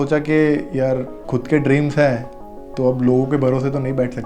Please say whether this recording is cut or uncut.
cut